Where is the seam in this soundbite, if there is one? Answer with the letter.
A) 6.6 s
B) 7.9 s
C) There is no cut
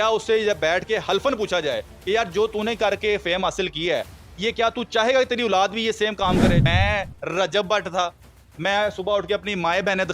A